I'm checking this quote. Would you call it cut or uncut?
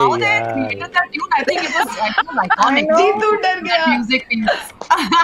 uncut